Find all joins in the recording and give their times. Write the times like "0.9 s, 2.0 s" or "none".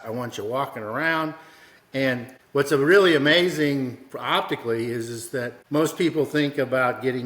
2.3 s, 5.6 s